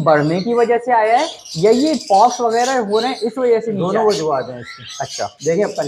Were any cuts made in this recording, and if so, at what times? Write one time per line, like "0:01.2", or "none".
none